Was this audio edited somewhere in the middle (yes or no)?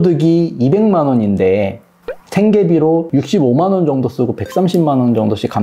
no